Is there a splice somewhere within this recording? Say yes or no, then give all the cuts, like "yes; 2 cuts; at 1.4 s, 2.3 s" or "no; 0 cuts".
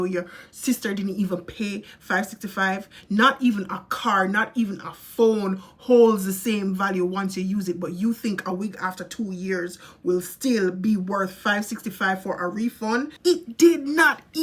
yes; 1 cut; at 13.1 s